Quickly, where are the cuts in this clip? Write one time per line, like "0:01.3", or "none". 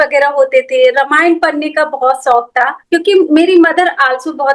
none